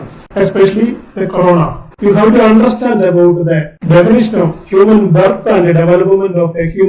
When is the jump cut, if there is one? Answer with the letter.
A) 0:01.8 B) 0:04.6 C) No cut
A